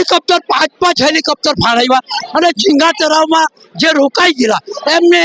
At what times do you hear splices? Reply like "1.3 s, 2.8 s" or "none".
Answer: none